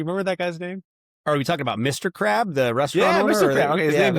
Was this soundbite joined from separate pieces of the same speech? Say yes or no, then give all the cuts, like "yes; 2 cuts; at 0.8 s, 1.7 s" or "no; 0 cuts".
no; 0 cuts